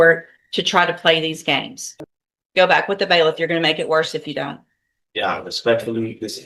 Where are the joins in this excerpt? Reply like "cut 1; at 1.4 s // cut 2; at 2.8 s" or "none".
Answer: cut 1; at 1.8 s